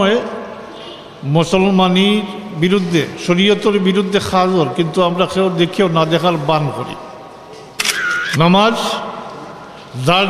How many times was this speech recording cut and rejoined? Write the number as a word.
one